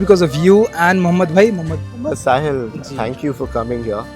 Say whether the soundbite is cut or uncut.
cut